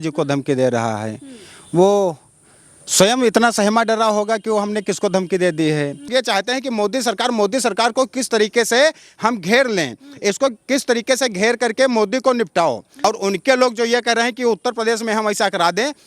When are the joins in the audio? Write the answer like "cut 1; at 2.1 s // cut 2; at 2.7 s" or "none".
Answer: cut 1; at 6.1 s // cut 2; at 12.9 s